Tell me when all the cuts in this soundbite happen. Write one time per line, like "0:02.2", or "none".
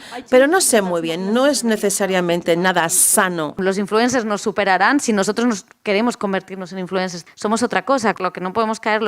0:03.6
0:07.2
0:08.2